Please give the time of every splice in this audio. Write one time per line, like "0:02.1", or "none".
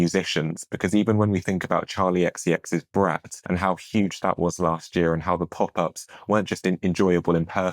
0:03.3